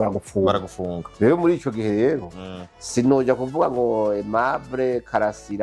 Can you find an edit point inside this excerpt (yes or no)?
no